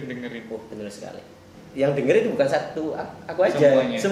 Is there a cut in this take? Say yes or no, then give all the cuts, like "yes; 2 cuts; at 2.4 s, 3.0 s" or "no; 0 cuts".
yes; 1 cut; at 1.4 s